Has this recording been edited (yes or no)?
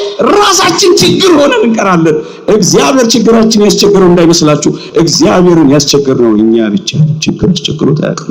no